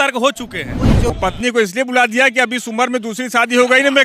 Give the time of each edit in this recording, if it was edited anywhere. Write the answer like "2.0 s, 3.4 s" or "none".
1.1 s